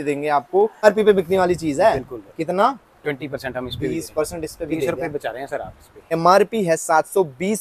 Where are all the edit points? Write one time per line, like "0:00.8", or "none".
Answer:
0:00.8
0:06.1